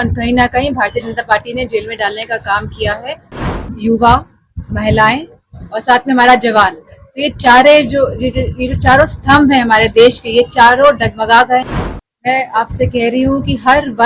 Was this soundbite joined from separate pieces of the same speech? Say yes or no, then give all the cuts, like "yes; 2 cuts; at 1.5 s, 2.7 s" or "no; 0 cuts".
yes; 2 cuts; at 3.4 s, 11.7 s